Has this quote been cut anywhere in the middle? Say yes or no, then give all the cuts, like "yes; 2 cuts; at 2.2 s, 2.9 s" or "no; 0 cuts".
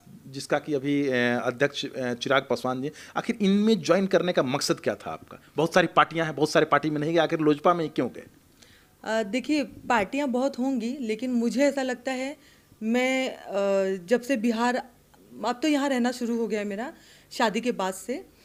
no; 0 cuts